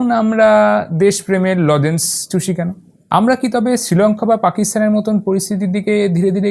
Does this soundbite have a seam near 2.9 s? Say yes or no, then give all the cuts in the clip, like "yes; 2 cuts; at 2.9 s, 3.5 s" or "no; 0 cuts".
yes; 1 cut; at 2.9 s